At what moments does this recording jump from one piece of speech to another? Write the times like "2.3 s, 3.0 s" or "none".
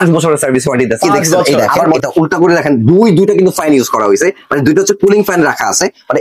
2.0 s